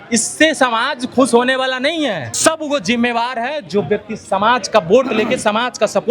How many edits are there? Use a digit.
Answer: 1